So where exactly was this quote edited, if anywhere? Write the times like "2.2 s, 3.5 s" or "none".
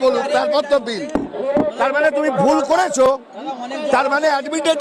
none